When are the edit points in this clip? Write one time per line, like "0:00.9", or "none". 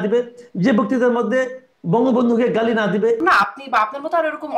0:03.2